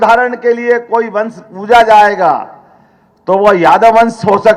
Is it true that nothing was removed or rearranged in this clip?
yes; 0 cuts

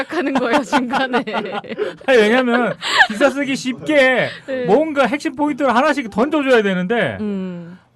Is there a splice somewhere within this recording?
yes; 1 cut; at 6.6 s

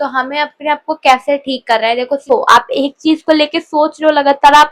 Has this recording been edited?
yes; 1 cut; at 2.2 s

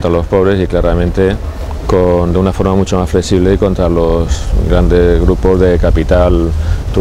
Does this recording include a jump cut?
no; 0 cuts

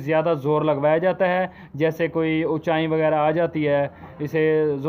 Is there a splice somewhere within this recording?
no; 0 cuts

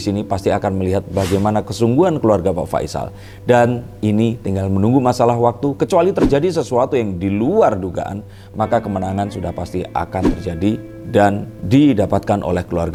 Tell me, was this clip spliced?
no; 0 cuts

